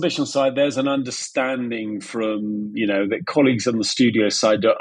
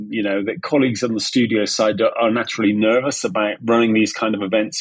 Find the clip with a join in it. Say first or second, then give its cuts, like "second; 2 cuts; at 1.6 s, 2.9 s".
second; 1 cut; at 3.6 s